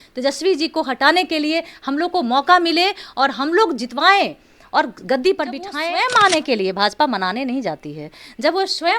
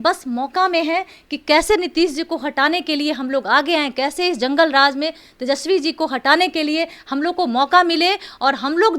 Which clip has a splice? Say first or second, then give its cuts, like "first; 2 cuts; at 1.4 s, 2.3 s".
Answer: first; 1 cut; at 5.7 s